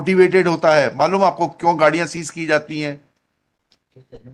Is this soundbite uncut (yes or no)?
yes